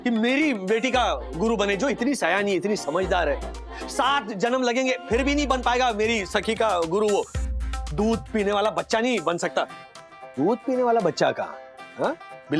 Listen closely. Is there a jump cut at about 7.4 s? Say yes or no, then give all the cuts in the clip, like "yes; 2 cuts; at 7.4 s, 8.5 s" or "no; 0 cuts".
yes; 1 cut; at 7.4 s